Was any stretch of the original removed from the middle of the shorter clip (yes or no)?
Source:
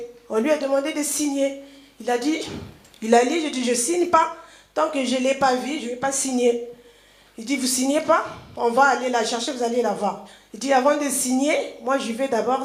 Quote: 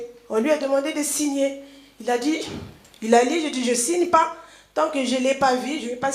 no